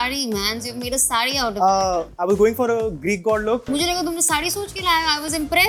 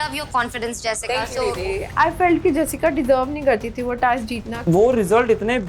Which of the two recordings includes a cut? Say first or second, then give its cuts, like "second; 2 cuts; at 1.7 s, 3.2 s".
second; 2 cuts; at 1.9 s, 4.7 s